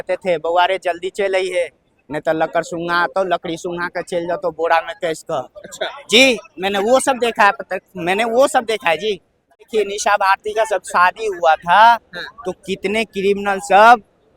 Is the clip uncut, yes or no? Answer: no